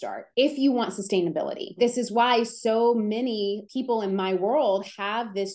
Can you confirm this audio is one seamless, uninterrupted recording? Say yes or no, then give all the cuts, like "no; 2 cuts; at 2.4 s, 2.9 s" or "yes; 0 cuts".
no; 1 cut; at 1.7 s